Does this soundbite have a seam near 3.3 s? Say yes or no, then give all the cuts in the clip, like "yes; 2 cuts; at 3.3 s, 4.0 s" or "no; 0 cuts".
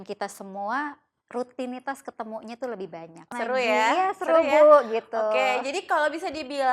yes; 1 cut; at 3.3 s